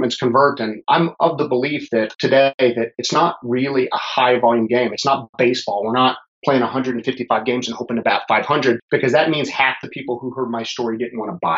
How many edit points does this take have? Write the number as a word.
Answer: three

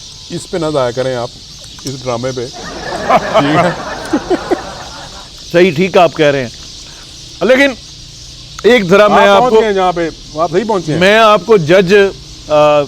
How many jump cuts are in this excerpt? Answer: zero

